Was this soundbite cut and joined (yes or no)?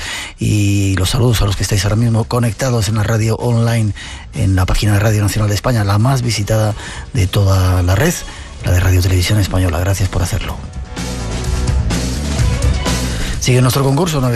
no